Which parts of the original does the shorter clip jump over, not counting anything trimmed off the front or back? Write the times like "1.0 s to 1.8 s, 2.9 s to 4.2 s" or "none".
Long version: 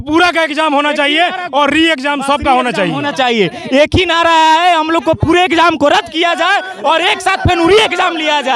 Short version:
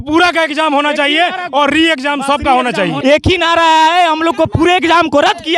3.0 s to 3.6 s